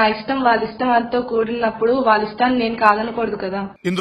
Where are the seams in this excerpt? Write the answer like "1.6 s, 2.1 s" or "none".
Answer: none